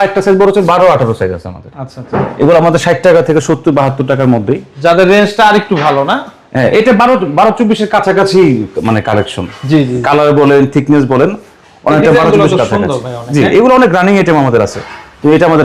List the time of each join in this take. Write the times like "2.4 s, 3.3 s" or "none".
none